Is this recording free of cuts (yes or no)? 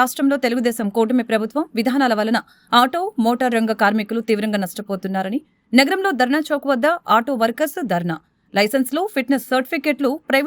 yes